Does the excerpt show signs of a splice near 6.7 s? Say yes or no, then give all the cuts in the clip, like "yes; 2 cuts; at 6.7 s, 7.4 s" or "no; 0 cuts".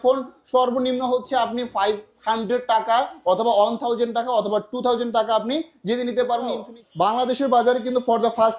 yes; 1 cut; at 6.7 s